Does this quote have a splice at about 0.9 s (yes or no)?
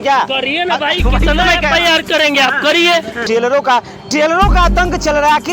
no